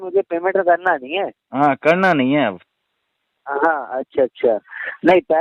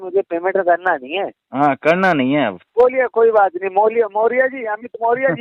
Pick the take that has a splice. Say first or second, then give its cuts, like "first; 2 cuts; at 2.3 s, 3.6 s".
second; 1 cut; at 2.7 s